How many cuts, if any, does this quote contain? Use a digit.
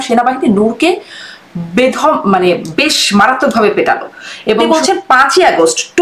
1